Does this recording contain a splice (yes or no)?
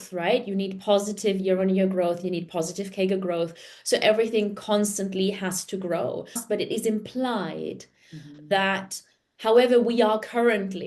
yes